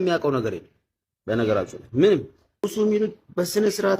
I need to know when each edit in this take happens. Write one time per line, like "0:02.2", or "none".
0:02.6